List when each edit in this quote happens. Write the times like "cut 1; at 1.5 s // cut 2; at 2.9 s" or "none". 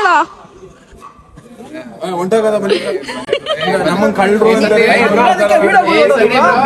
none